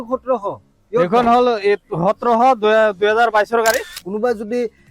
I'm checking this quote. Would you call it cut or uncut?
cut